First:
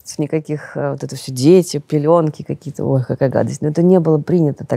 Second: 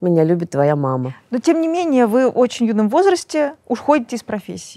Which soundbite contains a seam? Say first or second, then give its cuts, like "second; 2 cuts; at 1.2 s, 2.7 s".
second; 1 cut; at 1.1 s